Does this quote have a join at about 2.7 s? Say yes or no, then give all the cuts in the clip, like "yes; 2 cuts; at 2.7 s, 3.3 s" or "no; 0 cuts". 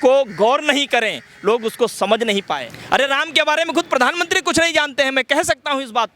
yes; 1 cut; at 2.7 s